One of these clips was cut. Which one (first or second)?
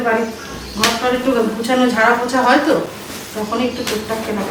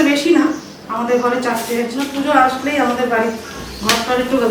second